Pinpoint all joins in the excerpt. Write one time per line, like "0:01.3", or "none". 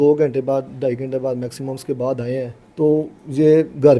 0:02.6